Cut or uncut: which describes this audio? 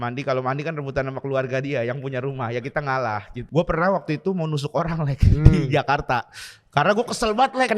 cut